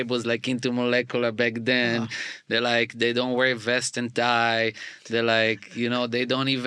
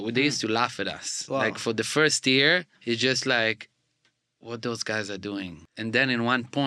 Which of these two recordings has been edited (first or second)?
second